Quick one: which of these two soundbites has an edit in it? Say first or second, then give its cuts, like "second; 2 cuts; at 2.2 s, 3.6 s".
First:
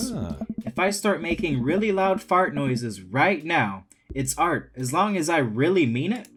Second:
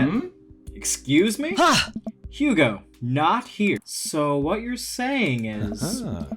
second; 1 cut; at 3.9 s